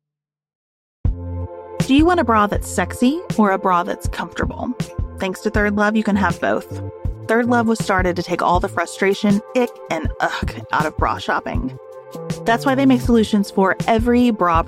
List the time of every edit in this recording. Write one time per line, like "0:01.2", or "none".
0:01.8